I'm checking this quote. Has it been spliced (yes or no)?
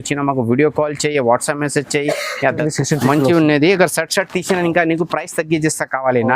yes